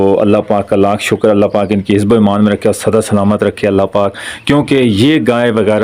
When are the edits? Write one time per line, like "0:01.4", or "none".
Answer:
none